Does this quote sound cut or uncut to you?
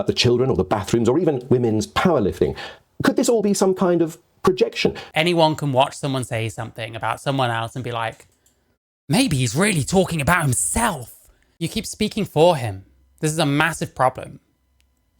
cut